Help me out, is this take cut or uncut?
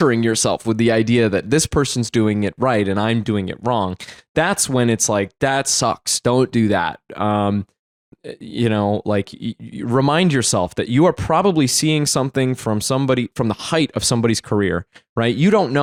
uncut